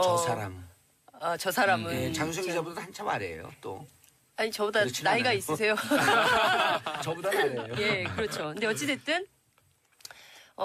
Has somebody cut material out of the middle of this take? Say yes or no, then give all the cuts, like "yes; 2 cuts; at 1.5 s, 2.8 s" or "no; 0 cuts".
no; 0 cuts